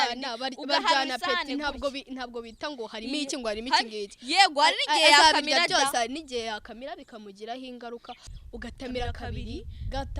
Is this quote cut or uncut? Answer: cut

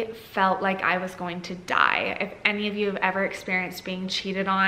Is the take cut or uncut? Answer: uncut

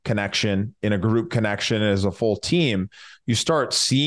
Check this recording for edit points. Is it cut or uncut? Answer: uncut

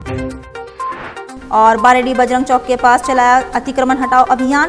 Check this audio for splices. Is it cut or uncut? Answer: uncut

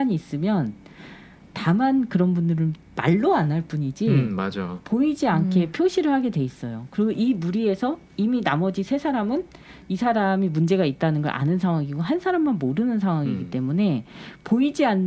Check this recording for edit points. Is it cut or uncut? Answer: uncut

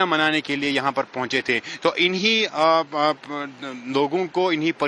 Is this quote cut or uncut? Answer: uncut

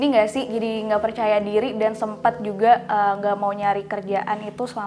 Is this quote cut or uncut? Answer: uncut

